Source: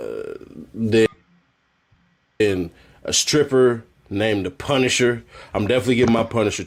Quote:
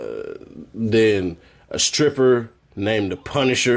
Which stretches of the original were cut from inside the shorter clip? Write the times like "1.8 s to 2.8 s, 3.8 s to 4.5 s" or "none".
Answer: 1.1 s to 2.4 s